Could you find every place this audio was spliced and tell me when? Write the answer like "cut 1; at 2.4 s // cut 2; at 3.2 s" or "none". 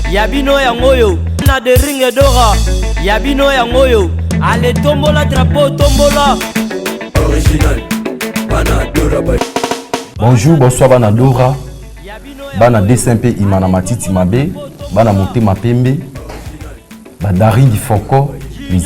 none